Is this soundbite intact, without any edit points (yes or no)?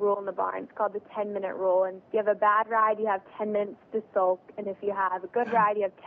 no